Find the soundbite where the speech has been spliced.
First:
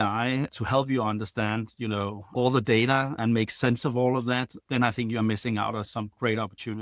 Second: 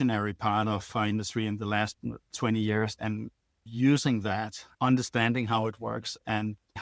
first; 4 cuts; at 2.3 s, 3.2 s, 4.7 s, 5.9 s

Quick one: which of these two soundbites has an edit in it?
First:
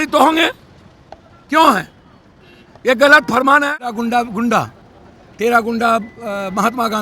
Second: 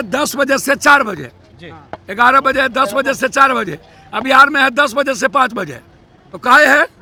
first; 1 cut; at 3.8 s

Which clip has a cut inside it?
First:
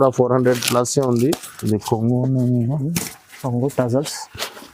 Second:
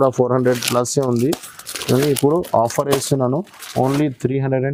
first; 1 cut; at 1.5 s

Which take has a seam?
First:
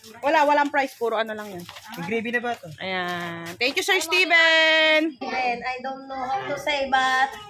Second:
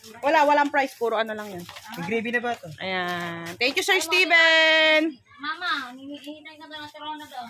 first; 1 cut; at 5.2 s

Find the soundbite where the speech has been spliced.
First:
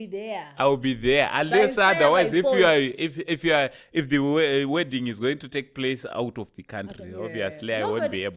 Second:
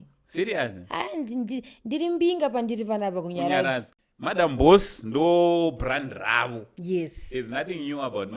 second; 1 cut; at 3.9 s

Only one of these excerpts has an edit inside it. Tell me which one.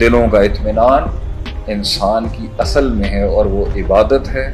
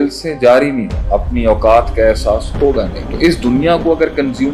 second; 2 cuts; at 0.9 s, 3.0 s

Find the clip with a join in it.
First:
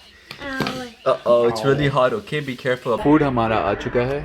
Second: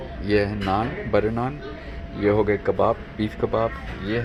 first; 1 cut; at 3.0 s

